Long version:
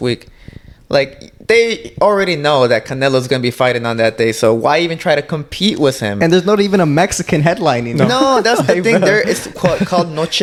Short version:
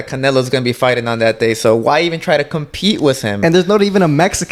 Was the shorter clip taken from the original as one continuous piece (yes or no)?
yes